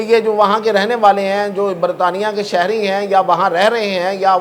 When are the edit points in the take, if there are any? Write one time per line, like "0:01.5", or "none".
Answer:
none